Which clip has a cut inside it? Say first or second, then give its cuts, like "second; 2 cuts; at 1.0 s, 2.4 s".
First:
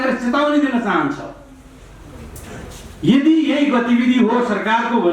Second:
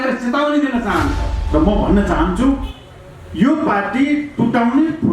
second; 1 cut; at 1.4 s